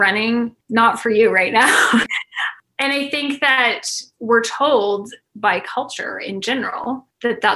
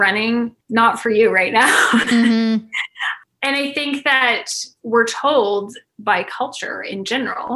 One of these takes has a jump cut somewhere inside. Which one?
first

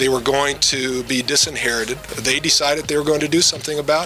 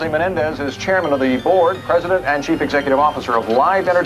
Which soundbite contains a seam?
first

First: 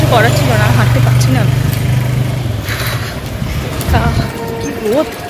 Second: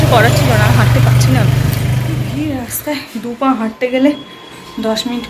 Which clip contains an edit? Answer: second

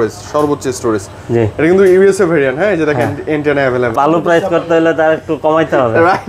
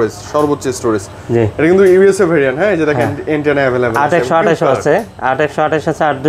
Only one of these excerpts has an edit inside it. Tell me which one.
first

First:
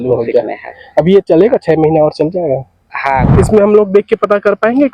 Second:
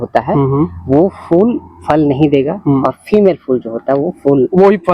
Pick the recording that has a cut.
first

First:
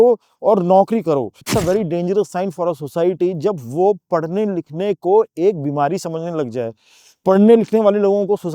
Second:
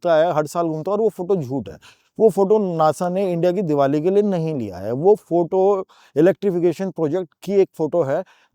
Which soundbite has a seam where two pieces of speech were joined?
first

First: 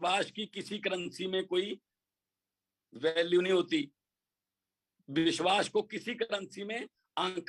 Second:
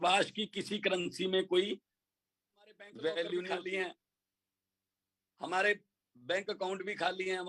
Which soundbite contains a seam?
second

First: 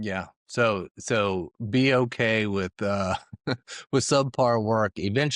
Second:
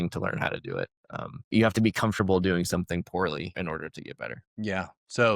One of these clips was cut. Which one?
second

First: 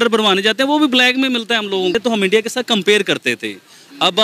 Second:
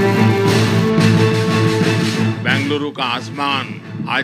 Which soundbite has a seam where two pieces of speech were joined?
first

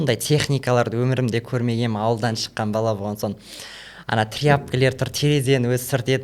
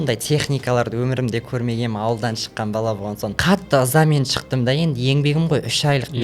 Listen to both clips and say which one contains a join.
second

